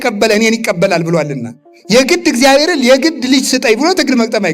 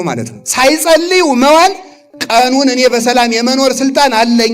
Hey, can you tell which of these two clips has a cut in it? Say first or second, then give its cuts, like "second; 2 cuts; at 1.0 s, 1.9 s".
first; 1 cut; at 1.7 s